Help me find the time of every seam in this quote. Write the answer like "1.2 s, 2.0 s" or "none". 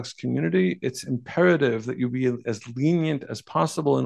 none